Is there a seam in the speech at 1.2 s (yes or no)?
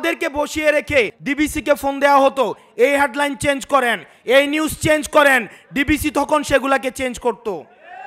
yes